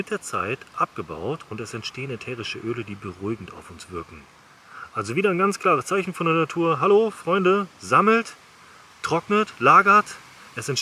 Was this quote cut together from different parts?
no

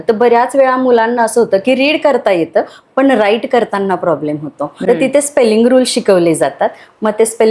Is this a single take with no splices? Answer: no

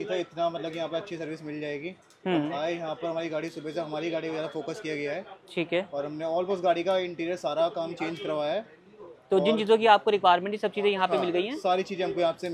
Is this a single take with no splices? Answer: yes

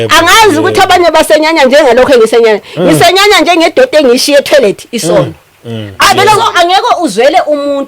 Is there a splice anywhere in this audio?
yes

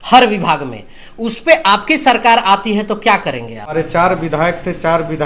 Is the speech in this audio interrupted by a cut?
yes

